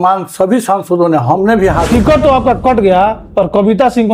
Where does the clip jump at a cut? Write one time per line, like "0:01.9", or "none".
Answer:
0:01.8